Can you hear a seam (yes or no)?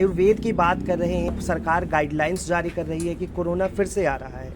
yes